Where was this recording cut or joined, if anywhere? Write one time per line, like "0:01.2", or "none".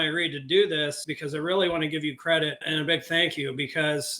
0:01.0
0:02.6